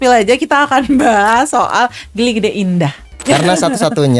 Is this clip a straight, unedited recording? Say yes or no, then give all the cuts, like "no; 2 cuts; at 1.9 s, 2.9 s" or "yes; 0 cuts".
no; 1 cut; at 3.2 s